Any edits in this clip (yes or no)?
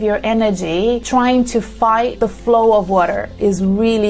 yes